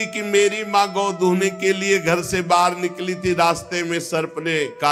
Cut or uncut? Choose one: uncut